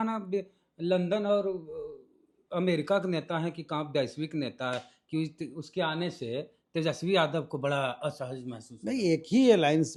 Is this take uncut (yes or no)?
yes